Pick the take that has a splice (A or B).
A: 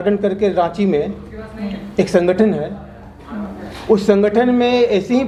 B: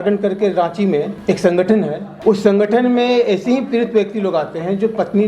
B